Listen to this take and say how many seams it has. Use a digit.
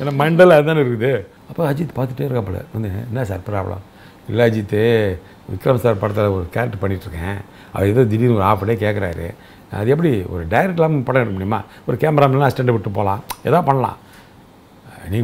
1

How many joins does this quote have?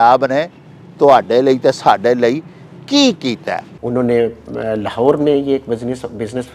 1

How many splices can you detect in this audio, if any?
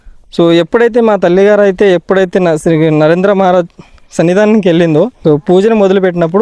1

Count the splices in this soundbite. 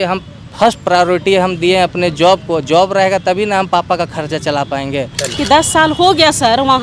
1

